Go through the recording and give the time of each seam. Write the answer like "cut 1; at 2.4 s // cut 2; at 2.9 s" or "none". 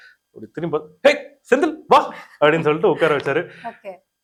none